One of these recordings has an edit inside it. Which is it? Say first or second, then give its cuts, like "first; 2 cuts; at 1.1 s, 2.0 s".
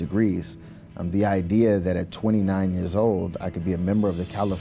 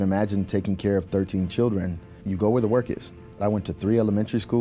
second; 2 cuts; at 2.1 s, 3.4 s